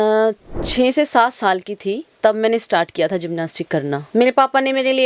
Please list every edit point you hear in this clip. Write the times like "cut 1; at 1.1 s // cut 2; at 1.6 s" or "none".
cut 1; at 4.0 s

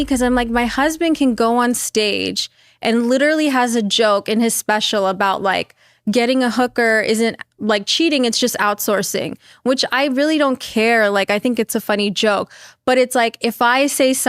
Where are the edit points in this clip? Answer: none

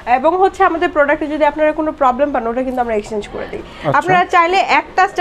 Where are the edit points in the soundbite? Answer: cut 1; at 3.7 s

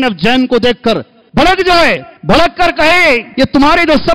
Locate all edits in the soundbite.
cut 1; at 1.2 s // cut 2; at 2.1 s // cut 3; at 3.3 s

